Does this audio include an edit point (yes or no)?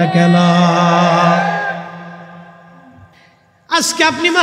yes